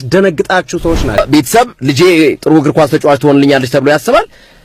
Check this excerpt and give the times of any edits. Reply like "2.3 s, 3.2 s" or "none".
1.2 s